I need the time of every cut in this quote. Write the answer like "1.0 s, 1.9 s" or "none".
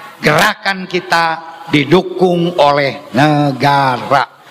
none